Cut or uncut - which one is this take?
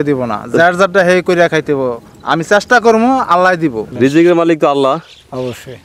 cut